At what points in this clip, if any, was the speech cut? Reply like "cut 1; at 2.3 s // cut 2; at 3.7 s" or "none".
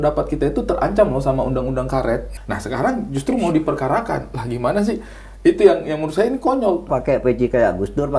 cut 1; at 2.3 s // cut 2; at 6.9 s